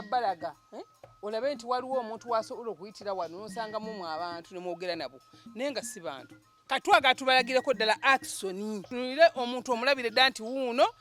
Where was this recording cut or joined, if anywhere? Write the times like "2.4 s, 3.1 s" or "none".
6.5 s, 8.9 s